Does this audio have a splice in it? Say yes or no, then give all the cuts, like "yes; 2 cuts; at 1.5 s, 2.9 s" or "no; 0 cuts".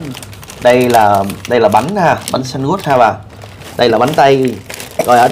no; 0 cuts